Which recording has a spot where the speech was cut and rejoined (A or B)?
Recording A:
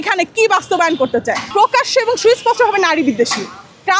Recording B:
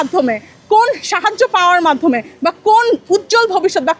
A